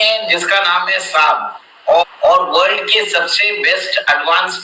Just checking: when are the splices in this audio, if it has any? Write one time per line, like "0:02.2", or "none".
0:02.0